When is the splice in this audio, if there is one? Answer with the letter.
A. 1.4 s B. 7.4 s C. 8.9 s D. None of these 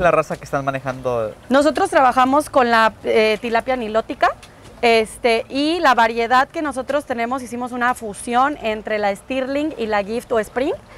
A